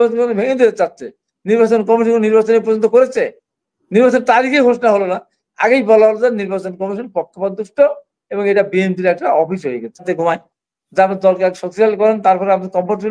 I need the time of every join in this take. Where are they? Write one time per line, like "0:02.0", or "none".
0:10.0